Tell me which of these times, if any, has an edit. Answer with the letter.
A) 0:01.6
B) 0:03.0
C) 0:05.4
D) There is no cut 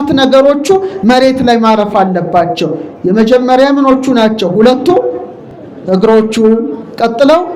D